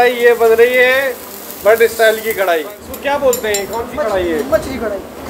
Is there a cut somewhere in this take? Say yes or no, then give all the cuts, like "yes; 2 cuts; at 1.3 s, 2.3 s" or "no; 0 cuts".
yes; 1 cut; at 2.8 s